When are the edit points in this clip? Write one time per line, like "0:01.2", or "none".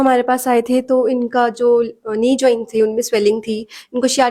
none